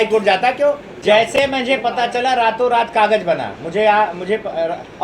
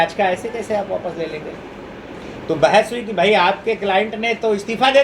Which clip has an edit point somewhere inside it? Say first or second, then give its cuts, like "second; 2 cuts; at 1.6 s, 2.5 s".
first; 1 cut; at 0.9 s